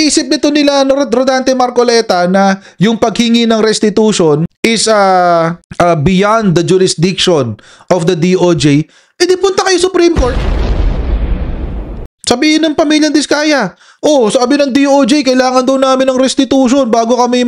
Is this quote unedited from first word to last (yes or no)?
no